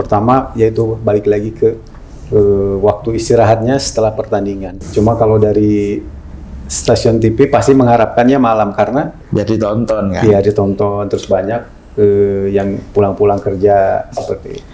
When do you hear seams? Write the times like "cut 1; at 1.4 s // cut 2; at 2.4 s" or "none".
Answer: cut 1; at 4.8 s // cut 2; at 9.2 s

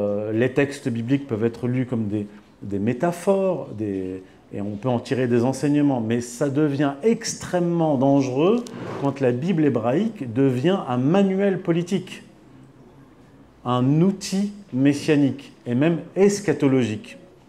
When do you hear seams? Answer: none

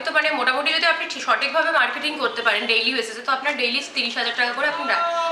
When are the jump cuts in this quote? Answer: none

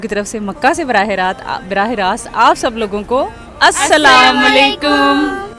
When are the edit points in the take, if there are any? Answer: none

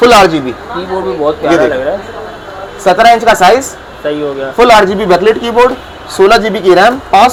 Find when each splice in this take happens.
none

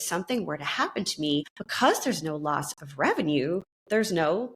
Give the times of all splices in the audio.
cut 1; at 1.6 s

